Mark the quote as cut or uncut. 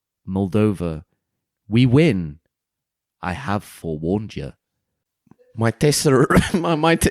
cut